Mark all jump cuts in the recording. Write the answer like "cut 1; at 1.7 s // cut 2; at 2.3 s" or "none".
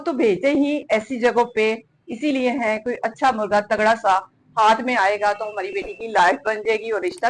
none

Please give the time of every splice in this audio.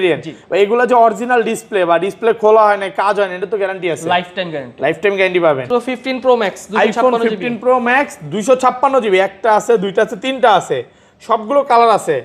cut 1; at 5.7 s

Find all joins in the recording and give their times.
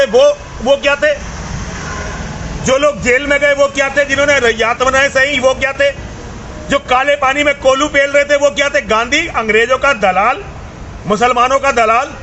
cut 1; at 8.6 s

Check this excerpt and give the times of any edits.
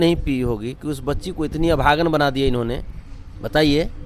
none

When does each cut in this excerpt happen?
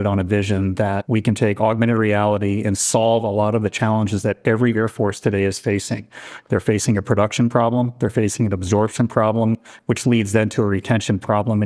cut 1; at 1.0 s

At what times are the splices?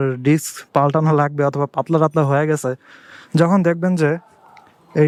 none

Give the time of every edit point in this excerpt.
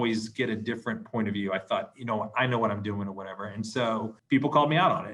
cut 1; at 4.2 s

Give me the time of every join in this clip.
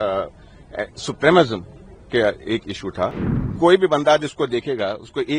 cut 1; at 3.1 s

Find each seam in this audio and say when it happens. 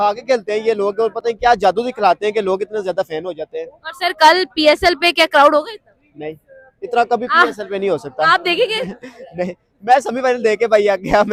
none

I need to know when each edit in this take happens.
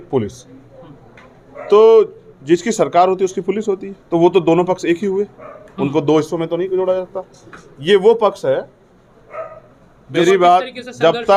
cut 1; at 10.2 s

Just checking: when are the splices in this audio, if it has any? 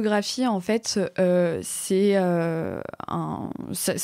none

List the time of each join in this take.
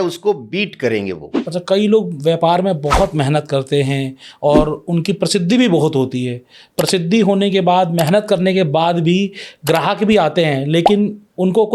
cut 1; at 1.3 s

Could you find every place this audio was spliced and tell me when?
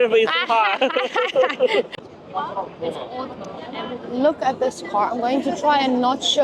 cut 1; at 2.0 s

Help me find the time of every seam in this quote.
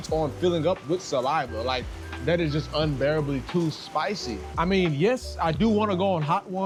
none

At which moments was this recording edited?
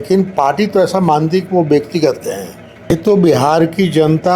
cut 1; at 2.9 s

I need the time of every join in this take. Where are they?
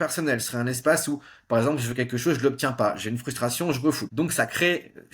cut 1; at 4.0 s

